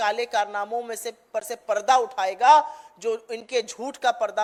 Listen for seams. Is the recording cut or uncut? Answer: uncut